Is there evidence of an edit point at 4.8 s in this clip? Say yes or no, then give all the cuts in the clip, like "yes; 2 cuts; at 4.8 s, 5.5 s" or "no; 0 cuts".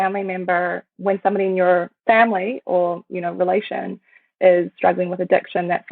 no; 1 cut; at 1.9 s